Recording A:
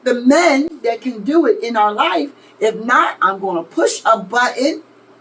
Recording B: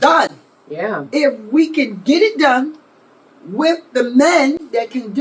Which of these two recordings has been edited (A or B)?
B